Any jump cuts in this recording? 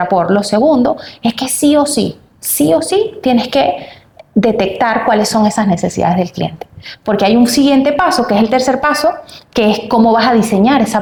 no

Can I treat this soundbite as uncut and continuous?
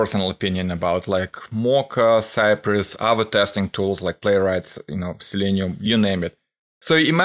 yes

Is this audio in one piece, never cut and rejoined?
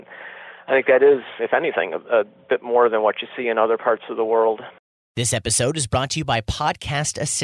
no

